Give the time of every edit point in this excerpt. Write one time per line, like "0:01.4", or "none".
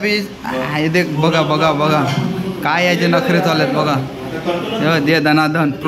none